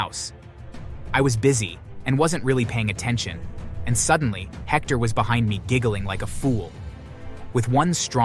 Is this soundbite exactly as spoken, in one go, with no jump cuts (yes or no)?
yes